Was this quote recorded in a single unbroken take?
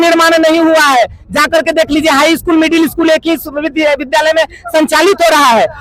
yes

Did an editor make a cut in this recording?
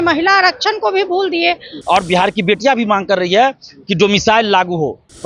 yes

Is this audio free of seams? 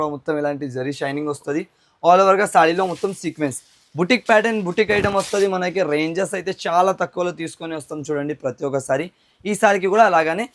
yes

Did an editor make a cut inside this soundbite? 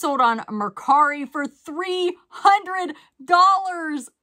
no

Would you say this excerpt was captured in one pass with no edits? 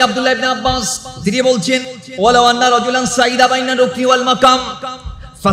no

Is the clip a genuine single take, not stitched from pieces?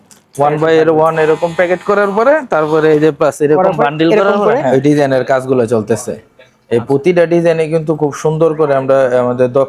no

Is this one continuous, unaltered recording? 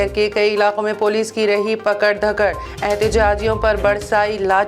yes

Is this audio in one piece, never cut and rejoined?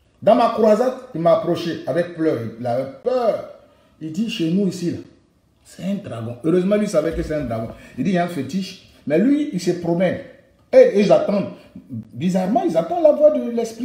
yes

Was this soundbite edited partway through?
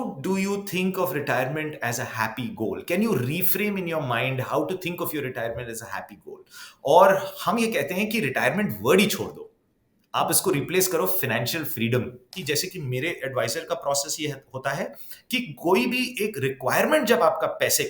yes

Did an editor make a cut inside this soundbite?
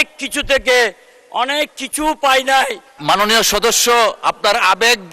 yes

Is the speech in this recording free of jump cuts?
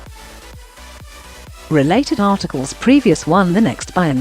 no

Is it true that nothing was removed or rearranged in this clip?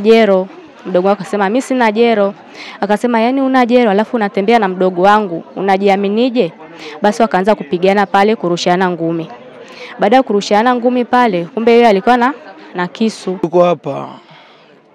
no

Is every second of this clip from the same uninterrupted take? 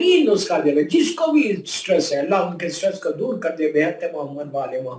yes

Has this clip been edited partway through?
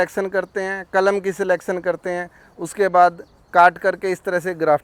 no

